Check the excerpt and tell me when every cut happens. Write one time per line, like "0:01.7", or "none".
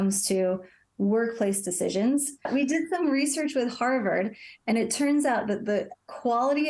0:02.5